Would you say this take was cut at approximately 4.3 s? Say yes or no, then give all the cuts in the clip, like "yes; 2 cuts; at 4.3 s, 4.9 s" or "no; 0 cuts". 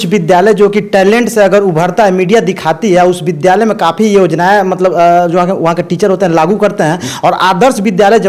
no; 0 cuts